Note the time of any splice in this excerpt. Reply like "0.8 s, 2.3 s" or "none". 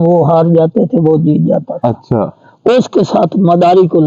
none